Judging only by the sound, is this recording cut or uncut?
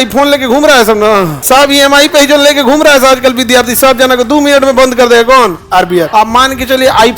cut